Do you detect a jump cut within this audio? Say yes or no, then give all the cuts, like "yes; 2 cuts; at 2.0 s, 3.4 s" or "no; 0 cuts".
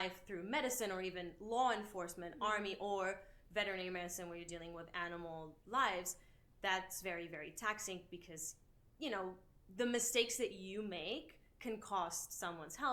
no; 0 cuts